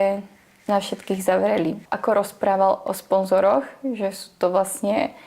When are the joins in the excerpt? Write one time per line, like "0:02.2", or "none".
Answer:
0:01.8